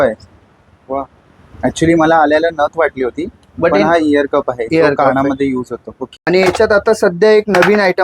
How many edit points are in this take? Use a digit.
0